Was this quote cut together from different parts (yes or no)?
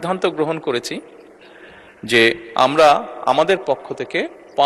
no